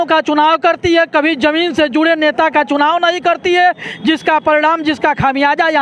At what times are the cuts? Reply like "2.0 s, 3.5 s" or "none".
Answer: none